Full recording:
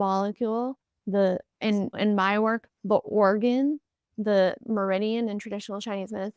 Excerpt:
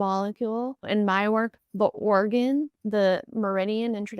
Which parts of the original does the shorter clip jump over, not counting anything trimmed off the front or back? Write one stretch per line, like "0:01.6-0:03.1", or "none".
0:00.8-0:01.9
0:03.9-0:04.1